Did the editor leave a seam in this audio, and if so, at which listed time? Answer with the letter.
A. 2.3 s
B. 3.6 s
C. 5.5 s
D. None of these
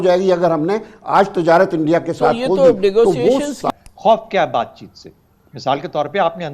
B